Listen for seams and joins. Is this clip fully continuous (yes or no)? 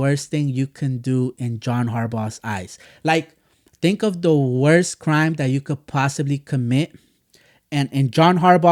yes